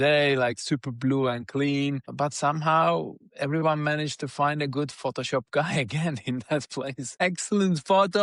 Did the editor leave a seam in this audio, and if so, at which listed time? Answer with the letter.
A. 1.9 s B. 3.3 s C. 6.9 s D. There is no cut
D